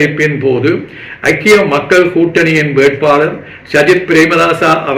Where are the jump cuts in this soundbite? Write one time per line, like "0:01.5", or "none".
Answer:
none